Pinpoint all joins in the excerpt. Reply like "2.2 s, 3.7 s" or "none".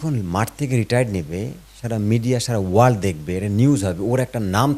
none